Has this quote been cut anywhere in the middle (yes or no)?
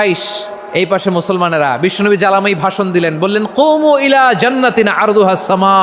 no